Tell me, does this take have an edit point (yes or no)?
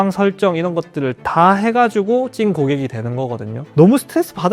yes